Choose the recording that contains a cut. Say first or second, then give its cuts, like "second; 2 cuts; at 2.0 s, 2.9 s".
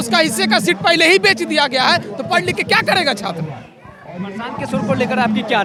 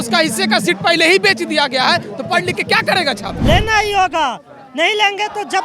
second; 1 cut; at 3.3 s